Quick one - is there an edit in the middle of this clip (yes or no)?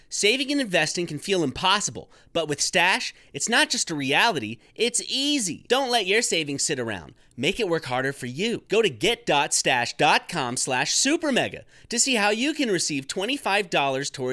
yes